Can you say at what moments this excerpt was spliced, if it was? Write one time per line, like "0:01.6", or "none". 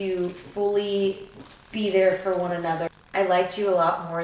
0:02.9